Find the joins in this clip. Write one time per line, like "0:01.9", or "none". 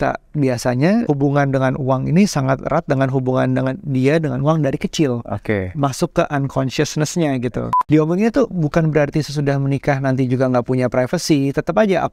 0:01.0
0:07.8